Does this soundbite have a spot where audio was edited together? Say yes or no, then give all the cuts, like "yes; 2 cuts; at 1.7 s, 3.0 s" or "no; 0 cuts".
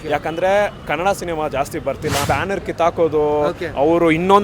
yes; 1 cut; at 2.2 s